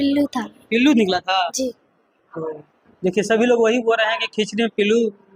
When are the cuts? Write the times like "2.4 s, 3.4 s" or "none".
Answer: none